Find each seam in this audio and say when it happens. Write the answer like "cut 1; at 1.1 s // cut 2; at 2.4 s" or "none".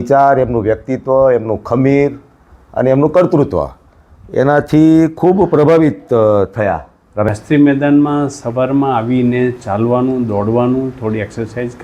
cut 1; at 7.3 s